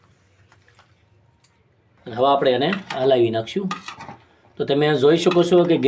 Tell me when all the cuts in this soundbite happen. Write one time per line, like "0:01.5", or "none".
0:02.0